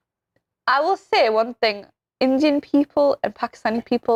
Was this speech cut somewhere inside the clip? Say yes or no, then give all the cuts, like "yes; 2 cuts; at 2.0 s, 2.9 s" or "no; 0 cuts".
no; 0 cuts